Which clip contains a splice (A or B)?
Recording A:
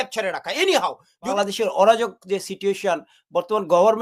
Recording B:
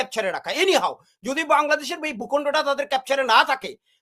A